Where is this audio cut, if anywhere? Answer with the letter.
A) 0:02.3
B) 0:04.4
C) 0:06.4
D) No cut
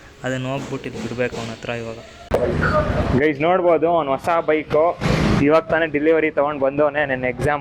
A